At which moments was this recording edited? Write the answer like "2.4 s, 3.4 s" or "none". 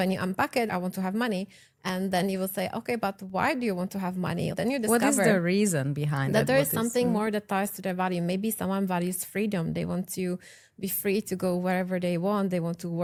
none